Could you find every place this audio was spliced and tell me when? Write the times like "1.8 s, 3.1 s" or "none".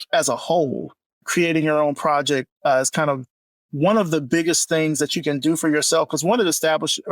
1.2 s